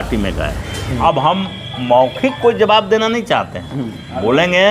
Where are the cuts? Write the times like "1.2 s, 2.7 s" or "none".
1.0 s